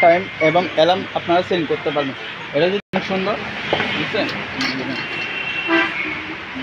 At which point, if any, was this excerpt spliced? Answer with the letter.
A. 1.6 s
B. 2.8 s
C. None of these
B